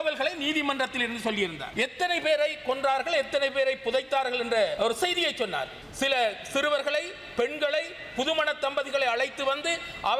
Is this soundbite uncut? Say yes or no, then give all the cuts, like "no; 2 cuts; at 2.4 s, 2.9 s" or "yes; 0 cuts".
no; 3 cuts; at 1.6 s, 4.7 s, 5.8 s